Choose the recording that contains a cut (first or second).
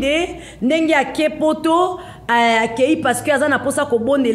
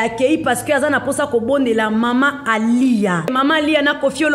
second